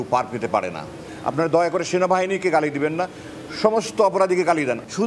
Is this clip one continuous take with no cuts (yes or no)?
yes